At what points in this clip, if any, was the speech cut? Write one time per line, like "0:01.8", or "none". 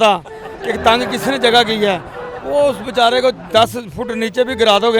none